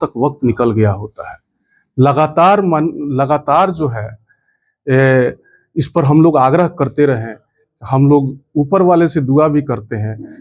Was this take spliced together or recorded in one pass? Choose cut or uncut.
uncut